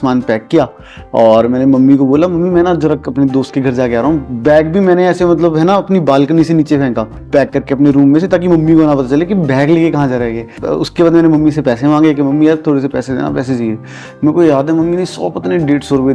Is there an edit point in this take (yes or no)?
no